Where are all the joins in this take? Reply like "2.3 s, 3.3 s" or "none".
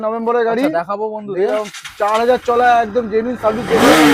none